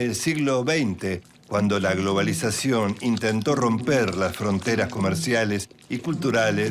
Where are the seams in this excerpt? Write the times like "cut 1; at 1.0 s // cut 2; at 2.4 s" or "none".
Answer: cut 1; at 2.3 s